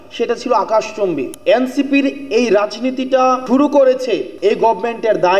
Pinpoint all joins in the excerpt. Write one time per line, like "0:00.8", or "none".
0:01.3
0:03.4
0:04.3